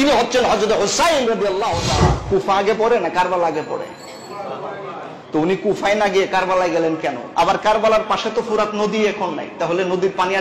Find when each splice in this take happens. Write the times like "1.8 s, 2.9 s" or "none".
2.2 s, 7.2 s